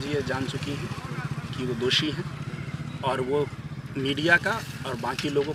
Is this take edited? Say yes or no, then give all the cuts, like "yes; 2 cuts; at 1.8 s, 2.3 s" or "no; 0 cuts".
no; 0 cuts